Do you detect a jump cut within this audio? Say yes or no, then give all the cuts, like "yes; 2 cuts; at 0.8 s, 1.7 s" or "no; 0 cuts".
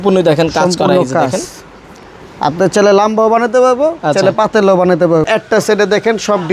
yes; 1 cut; at 5.3 s